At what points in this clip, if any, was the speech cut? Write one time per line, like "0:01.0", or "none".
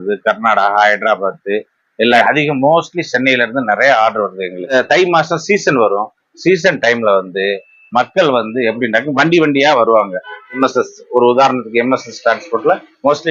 0:02.2
0:04.7
0:10.6